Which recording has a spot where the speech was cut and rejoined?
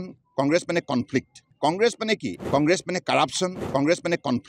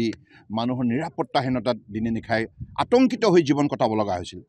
first; 3 cuts; at 1.5 s, 2.4 s, 3.6 s

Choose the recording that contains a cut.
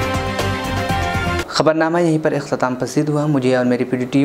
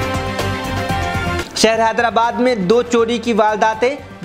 second; 1 cut; at 1.4 s

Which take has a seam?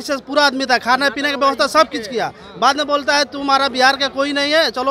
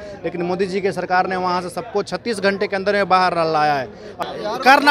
second; 1 cut; at 4.0 s

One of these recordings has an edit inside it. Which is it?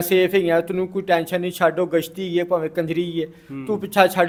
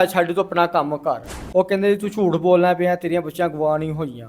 second; 1 cut; at 1.3 s

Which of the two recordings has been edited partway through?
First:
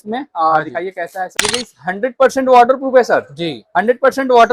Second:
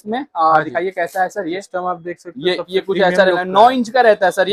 first; 1 cut; at 1.3 s

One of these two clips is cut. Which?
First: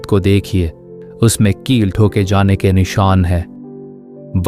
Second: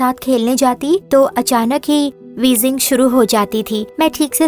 second; 1 cut; at 1.0 s

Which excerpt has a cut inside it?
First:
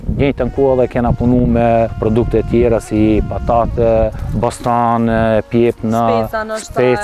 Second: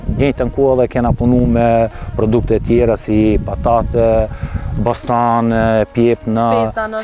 first; 2 cuts; at 1.9 s, 4.2 s

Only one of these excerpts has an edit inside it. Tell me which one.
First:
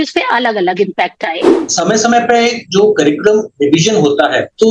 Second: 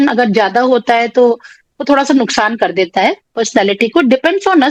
first; 1 cut; at 1.6 s

